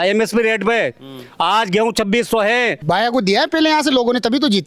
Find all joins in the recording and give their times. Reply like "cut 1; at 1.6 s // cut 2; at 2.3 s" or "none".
cut 1; at 2.8 s